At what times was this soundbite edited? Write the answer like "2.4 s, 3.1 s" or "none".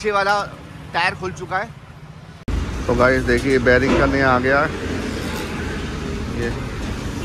2.4 s